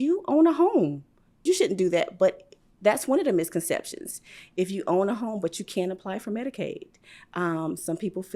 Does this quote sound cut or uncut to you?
cut